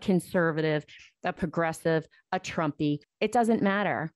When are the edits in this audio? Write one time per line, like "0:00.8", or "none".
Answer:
0:03.1